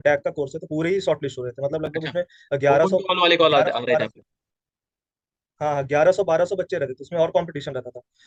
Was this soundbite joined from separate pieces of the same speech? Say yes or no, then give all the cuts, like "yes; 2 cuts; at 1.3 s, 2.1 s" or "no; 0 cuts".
no; 0 cuts